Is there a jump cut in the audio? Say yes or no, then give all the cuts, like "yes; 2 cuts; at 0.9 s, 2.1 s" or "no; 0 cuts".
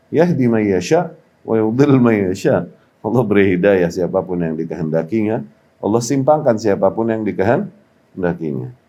no; 0 cuts